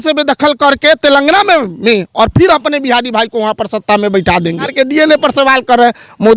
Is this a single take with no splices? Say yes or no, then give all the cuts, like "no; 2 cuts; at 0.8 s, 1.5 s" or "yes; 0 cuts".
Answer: no; 1 cut; at 4.7 s